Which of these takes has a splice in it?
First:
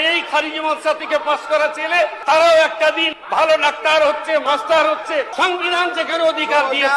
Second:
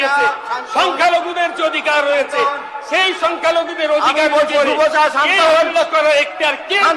first; 4 cuts; at 2.2 s, 3.1 s, 4.4 s, 5.3 s

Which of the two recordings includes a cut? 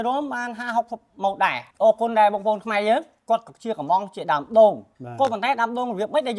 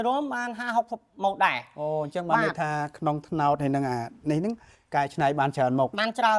first; 2 cuts; at 1.6 s, 3.1 s

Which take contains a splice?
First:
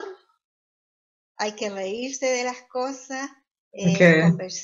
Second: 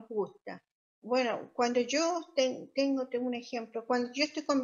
second; 1 cut; at 0.9 s

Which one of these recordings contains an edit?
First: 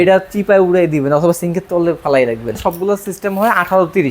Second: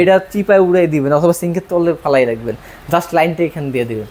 first; 1 cut; at 2.5 s

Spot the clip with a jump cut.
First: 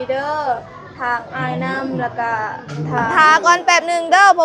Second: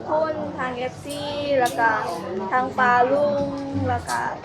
first; 1 cut; at 3.1 s

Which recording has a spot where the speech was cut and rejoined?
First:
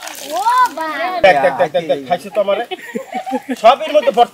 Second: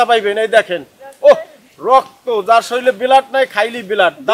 first; 1 cut; at 1.2 s

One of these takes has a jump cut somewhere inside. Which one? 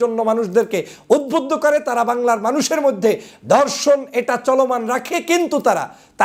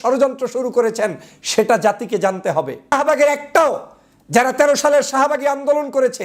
second; 1 cut; at 2.9 s

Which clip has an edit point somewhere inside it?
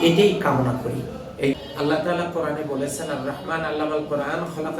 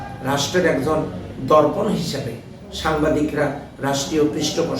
first; 1 cut; at 1.5 s

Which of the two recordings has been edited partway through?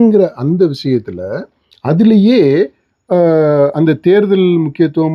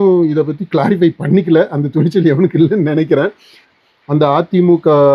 second; 1 cut; at 3.6 s

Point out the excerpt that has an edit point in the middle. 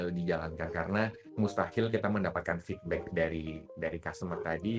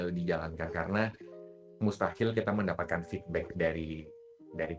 first; 2 cuts; at 1.2 s, 3.6 s

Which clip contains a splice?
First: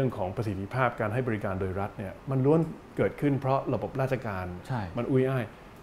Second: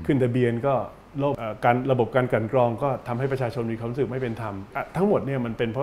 second; 2 cuts; at 1.4 s, 4.7 s

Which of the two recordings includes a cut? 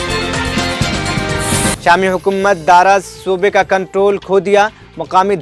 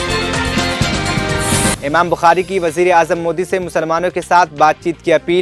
second; 1 cut; at 1.8 s

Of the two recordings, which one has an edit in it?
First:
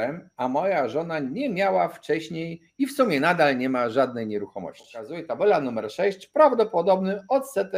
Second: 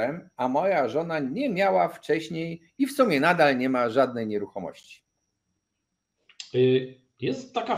first; 1 cut; at 5.2 s

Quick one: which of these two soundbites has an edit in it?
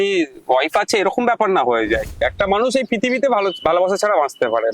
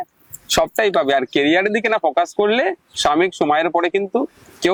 first; 1 cut; at 2.2 s

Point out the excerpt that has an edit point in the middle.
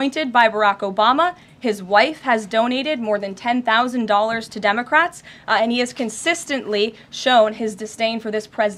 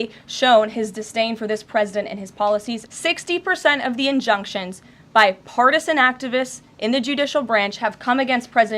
second; 1 cut; at 2.9 s

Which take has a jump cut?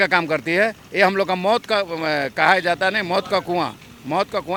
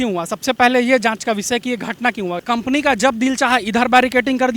second; 1 cut; at 2.4 s

